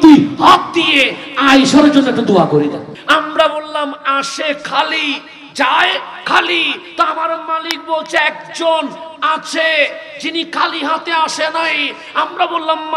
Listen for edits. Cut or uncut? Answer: cut